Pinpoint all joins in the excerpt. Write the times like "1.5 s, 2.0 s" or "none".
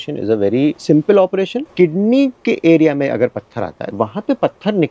0.8 s, 1.7 s, 3.8 s